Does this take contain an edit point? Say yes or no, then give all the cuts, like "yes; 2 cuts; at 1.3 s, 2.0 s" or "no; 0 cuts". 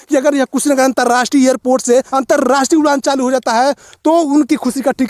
yes; 1 cut; at 2.1 s